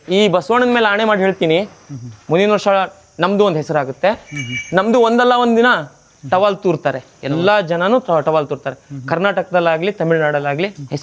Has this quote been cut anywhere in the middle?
no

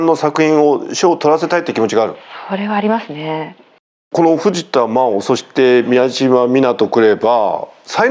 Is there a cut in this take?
yes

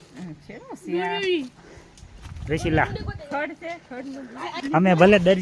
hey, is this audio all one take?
no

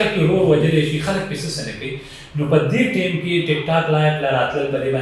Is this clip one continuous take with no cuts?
yes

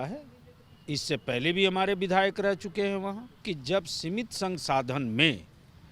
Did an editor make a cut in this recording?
yes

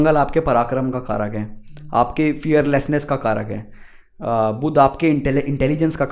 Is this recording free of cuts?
yes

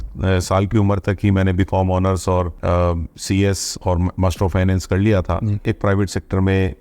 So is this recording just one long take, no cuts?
no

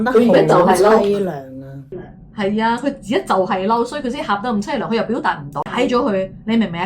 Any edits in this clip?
yes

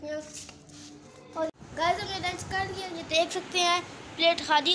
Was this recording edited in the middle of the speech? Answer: yes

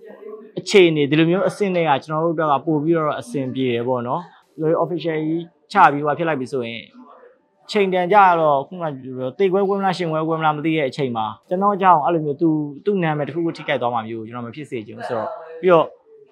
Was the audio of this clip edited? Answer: yes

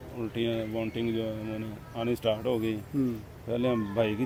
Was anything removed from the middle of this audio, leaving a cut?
no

